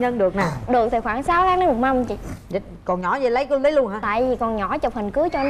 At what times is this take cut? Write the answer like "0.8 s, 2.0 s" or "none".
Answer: none